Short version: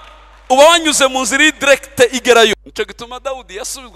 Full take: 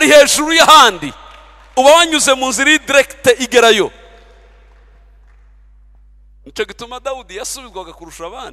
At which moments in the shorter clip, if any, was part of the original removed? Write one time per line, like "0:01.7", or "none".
0:02.5